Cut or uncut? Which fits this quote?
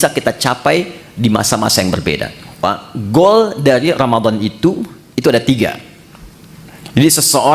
cut